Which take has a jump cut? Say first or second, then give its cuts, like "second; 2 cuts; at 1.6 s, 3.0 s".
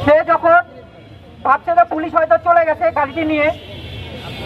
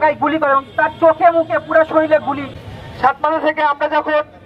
second; 1 cut; at 2.6 s